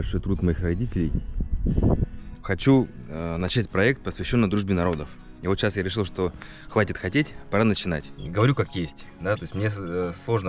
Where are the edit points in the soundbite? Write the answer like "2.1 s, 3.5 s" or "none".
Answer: 2.5 s, 8.2 s